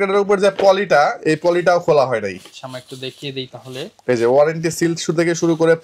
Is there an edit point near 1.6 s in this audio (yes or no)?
no